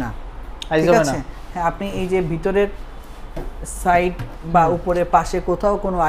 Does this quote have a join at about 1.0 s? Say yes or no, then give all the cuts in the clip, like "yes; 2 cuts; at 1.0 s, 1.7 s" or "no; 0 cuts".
no; 0 cuts